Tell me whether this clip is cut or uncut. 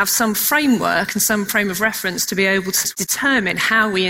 cut